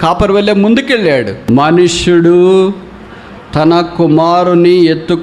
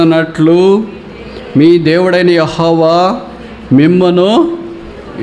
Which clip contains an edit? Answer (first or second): first